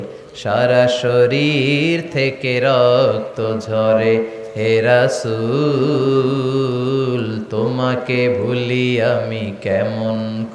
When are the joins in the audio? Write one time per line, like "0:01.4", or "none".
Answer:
none